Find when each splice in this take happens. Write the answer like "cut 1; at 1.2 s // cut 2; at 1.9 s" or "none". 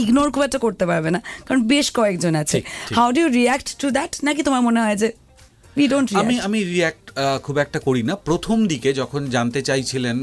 none